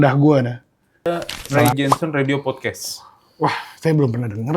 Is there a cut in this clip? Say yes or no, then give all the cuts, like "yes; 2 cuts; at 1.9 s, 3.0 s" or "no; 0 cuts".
yes; 1 cut; at 1.0 s